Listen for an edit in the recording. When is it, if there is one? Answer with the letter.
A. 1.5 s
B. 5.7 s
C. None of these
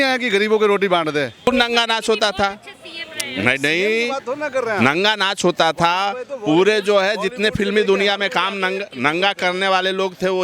A